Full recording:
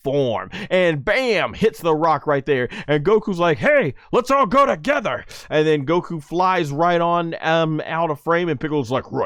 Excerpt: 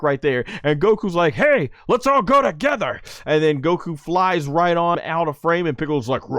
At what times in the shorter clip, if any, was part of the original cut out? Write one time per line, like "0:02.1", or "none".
0:05.0